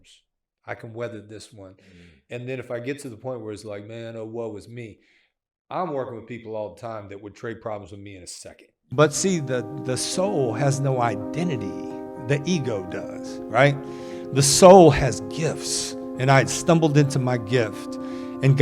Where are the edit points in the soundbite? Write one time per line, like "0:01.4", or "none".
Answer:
0:08.9

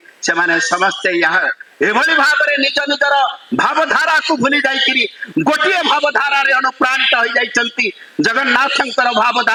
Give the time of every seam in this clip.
none

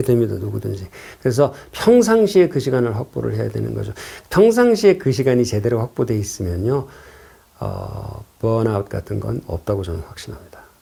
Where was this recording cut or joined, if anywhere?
none

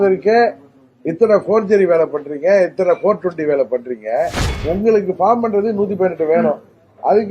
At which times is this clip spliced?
0:04.5

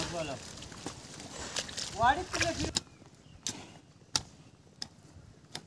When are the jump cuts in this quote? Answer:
0:02.7

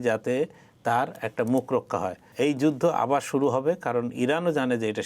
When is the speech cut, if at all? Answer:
0:02.2

